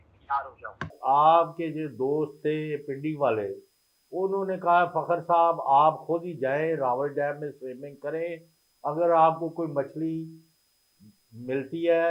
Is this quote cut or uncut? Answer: cut